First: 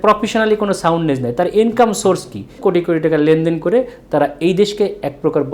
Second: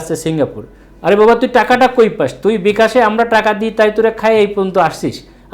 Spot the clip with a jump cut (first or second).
first